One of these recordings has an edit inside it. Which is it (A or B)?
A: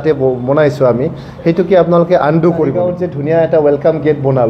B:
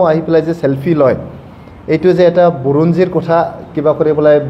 A